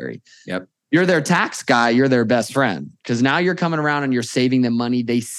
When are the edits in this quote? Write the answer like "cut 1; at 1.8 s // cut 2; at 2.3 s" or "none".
none